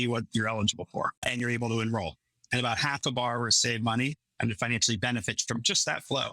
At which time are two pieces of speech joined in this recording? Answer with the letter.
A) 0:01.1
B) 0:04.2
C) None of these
A